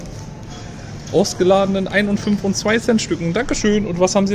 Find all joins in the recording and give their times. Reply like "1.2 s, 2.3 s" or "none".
none

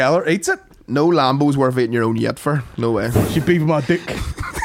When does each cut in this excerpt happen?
3.2 s

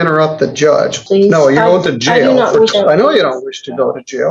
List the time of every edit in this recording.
1.0 s, 2.7 s

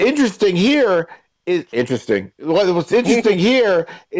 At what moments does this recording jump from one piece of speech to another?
none

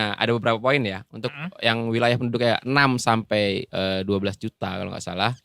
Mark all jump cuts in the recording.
none

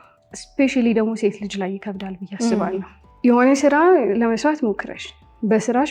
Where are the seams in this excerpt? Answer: 3.0 s

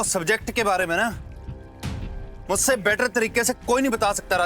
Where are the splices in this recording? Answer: none

